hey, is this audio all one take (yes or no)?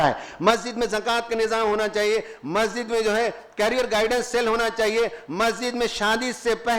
yes